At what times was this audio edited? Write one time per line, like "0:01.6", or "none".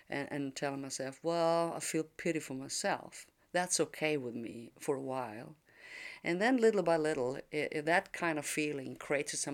none